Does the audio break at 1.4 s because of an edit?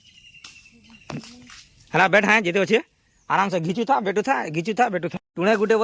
no; 0 cuts

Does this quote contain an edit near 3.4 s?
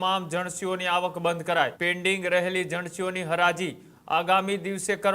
no; 1 cut; at 1.8 s

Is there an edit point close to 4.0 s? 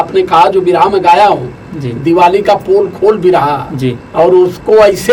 yes; 1 cut; at 4.0 s

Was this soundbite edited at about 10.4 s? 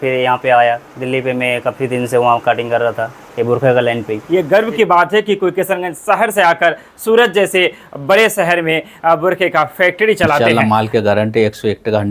yes; 2 cuts; at 4.2 s, 10.4 s

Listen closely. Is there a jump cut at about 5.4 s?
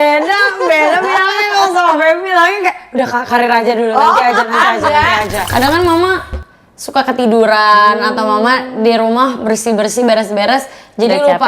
yes; 1 cut; at 5.4 s

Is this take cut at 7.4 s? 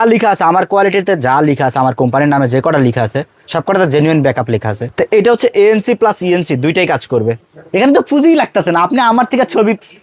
yes; 2 cuts; at 4.8 s, 7.4 s

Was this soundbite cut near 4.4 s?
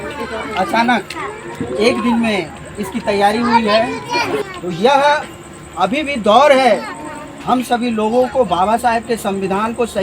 yes; 1 cut; at 4.4 s

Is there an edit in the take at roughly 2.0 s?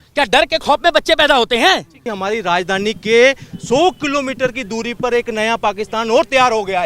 yes; 1 cut; at 2.0 s

